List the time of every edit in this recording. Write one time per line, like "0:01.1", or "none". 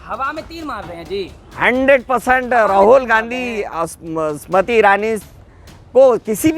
none